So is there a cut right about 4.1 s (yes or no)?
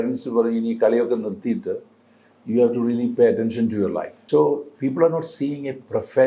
yes